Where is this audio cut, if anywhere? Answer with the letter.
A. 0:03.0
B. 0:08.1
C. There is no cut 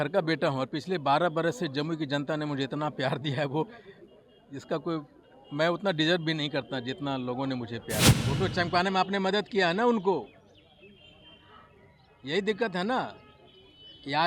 B